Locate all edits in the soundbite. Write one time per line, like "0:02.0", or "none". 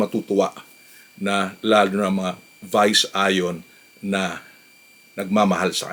none

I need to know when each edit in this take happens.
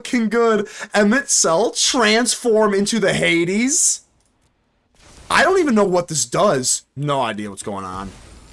0:01.8
0:06.8

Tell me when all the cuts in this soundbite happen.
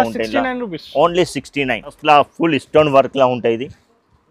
0:02.0

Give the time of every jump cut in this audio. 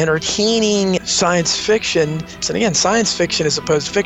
0:01.0
0:02.4

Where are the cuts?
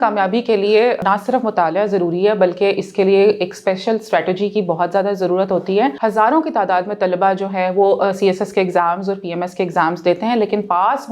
0:01.0
0:05.9

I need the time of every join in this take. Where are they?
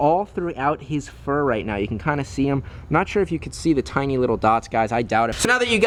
none

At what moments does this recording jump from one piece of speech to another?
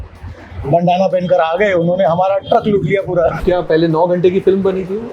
0:03.4

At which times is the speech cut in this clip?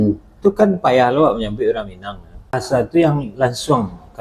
0:02.6

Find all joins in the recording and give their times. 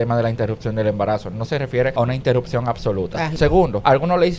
0:01.9
0:03.5

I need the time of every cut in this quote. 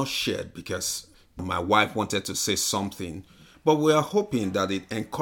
0:01.4

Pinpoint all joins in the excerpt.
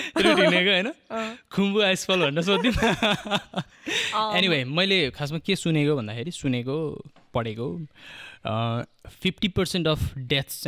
none

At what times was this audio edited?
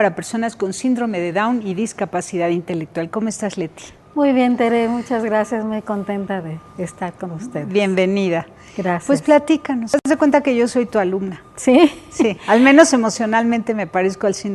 none

